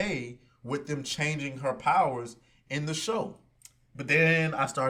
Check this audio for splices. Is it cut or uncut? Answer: uncut